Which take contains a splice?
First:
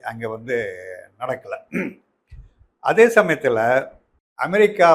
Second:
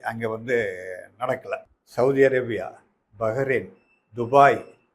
second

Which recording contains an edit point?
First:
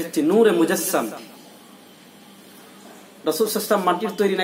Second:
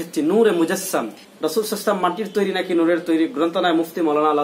second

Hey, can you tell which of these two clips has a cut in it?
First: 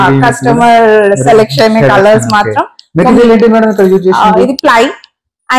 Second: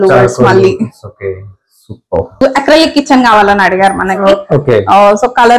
second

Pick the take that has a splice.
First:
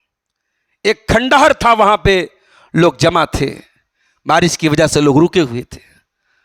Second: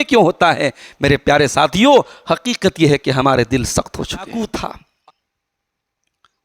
second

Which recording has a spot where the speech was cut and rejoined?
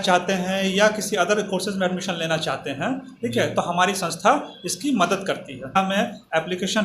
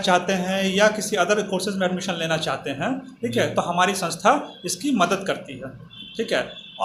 first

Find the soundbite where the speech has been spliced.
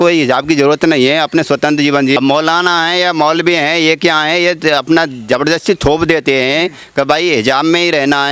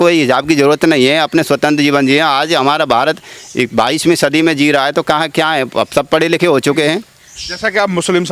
first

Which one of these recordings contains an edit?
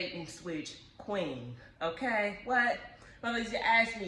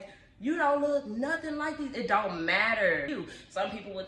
second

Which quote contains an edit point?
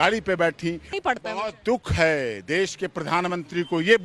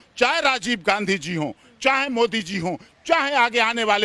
first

